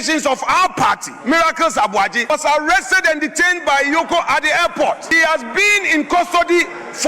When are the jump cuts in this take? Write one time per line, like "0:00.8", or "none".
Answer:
0:02.3
0:05.2